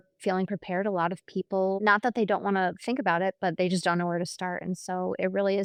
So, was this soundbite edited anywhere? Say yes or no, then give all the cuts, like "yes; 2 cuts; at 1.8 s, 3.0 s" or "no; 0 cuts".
no; 0 cuts